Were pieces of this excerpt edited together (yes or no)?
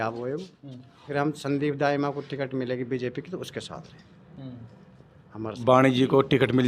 yes